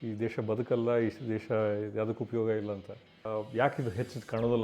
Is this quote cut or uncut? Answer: cut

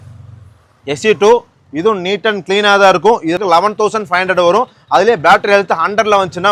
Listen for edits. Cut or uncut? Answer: cut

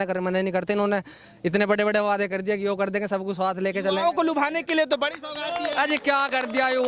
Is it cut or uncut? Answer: uncut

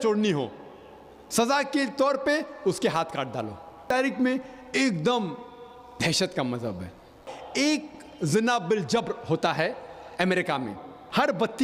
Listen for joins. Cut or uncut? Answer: cut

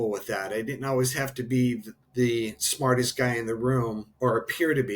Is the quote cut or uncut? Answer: cut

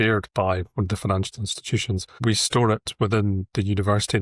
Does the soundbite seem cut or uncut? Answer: cut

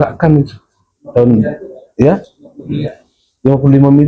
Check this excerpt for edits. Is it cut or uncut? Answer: uncut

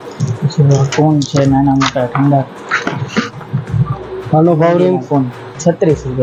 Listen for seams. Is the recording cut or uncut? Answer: uncut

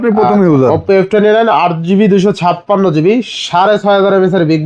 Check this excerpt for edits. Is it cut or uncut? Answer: uncut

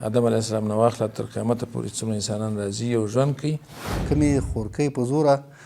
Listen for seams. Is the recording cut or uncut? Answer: cut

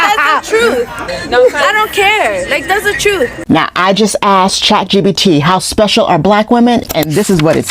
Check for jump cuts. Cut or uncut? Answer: cut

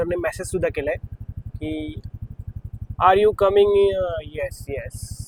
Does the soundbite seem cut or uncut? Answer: uncut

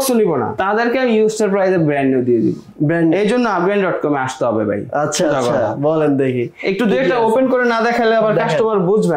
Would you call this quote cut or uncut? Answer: uncut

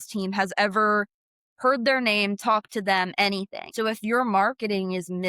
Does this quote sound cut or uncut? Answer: cut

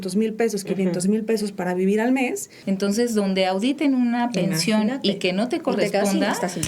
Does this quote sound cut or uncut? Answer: cut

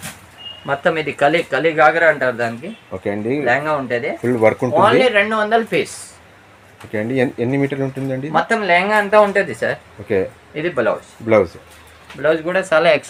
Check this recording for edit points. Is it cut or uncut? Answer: uncut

